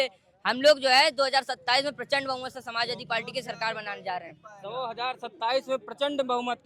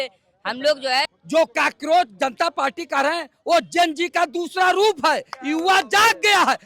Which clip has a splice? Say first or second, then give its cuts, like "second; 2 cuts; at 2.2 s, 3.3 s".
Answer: second; 1 cut; at 1.1 s